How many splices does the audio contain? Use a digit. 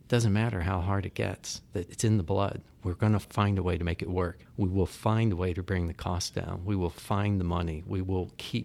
3